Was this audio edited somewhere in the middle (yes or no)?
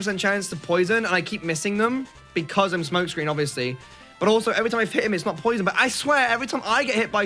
no